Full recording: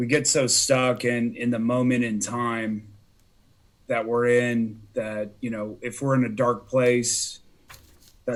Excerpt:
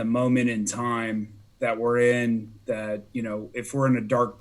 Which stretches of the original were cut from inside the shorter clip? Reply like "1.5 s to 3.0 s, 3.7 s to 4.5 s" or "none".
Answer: 2.9 s to 3.7 s